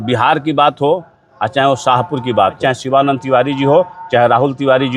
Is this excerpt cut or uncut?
cut